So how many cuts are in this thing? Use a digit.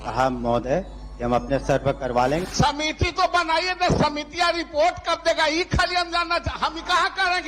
1